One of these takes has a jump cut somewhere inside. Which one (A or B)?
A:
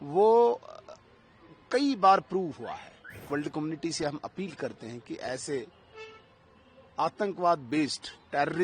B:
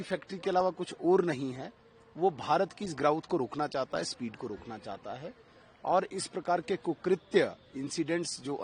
A